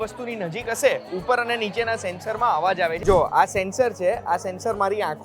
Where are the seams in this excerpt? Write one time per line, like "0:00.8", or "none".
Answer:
0:03.0